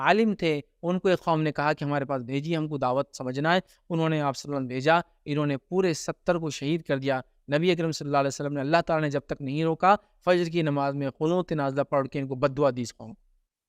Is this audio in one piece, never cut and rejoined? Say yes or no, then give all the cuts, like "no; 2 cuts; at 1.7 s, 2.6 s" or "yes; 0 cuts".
yes; 0 cuts